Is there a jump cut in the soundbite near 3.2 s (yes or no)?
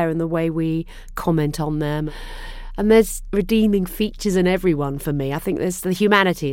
yes